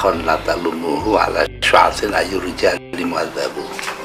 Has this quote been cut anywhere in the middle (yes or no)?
no